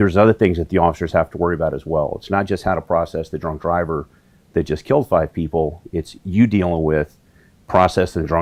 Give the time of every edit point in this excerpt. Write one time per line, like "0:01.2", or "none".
none